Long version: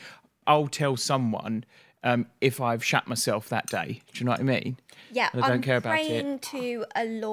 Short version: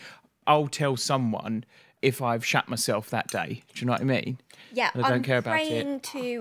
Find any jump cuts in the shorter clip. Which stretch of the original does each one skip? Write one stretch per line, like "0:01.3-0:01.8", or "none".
0:01.9-0:02.3